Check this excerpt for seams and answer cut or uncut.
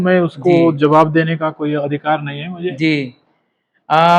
uncut